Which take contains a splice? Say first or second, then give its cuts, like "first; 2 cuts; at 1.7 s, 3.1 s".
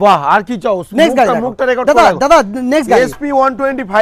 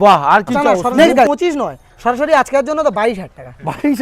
second; 1 cut; at 1.3 s